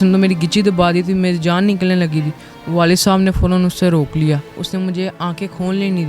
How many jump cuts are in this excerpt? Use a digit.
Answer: 1